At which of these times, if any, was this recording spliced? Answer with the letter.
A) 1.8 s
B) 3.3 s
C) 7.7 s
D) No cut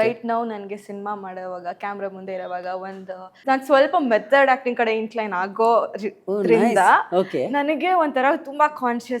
B